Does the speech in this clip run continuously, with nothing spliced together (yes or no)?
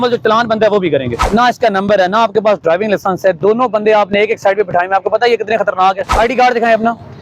no